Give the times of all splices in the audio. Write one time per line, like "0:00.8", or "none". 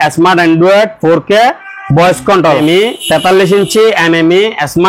0:02.6